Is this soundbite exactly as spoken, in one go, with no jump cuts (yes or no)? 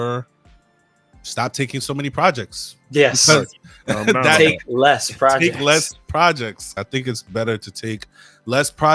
no